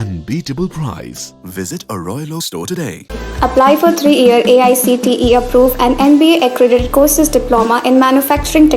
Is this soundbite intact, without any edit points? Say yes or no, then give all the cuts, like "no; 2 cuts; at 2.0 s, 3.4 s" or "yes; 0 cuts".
yes; 0 cuts